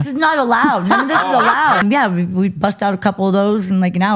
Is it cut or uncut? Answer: cut